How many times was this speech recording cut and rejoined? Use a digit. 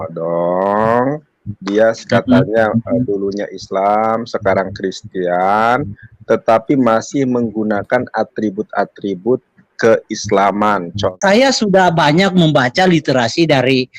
1